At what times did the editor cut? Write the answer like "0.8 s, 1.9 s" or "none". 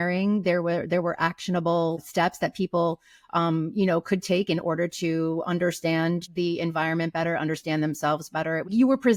none